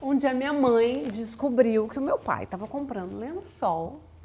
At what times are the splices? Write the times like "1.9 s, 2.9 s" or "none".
none